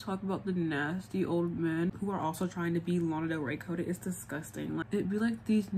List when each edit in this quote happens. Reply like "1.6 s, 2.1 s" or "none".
none